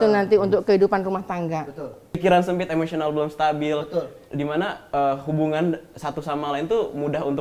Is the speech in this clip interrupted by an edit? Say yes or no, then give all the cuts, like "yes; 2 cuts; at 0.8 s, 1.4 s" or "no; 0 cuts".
yes; 1 cut; at 2.2 s